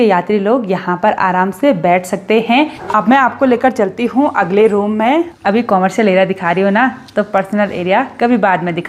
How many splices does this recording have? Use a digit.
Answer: 2